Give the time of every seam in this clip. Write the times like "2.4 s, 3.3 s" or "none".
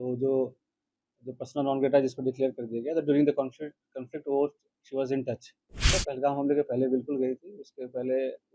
5.9 s